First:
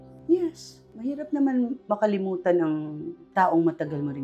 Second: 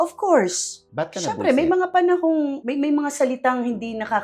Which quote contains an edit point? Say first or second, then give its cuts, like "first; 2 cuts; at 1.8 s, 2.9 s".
second; 1 cut; at 2.6 s